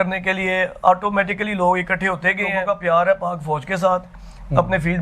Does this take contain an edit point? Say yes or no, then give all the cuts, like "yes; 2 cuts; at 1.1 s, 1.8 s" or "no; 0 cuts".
yes; 1 cut; at 2.6 s